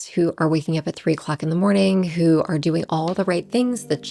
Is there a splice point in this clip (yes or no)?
no